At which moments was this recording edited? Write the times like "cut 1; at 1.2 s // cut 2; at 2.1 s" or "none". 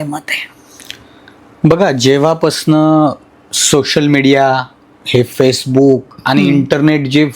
none